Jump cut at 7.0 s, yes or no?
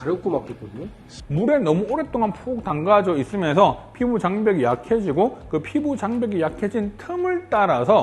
no